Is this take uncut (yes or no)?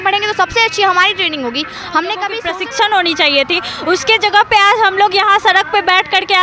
no